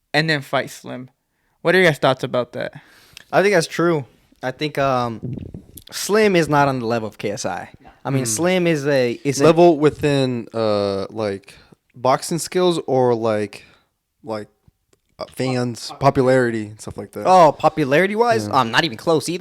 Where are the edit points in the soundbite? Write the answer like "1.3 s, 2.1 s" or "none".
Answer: none